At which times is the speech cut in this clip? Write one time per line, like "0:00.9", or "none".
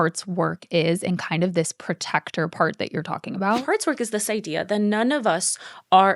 0:03.6